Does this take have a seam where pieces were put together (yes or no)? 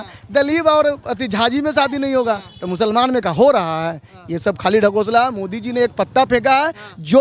no